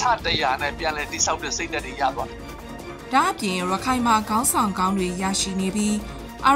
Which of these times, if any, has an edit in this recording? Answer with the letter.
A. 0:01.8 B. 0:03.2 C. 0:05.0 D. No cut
D